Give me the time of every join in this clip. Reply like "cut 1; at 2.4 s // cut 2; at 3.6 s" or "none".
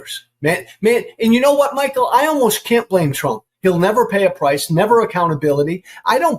cut 1; at 3.5 s

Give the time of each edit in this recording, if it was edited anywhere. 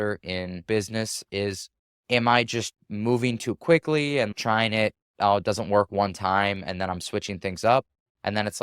cut 1; at 1.3 s

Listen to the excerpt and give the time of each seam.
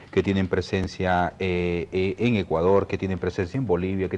cut 1; at 1.7 s

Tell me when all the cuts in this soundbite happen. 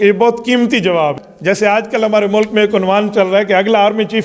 cut 1; at 1.2 s

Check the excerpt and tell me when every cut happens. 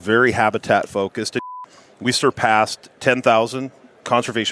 cut 1; at 1.4 s

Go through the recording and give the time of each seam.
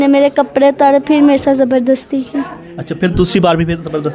none

